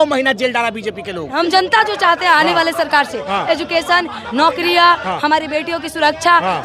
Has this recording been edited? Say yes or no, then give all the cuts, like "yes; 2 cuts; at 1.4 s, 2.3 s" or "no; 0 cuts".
yes; 1 cut; at 1.3 s